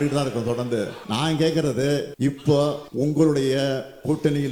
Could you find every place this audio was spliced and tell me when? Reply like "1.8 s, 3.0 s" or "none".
1.0 s, 2.1 s, 2.8 s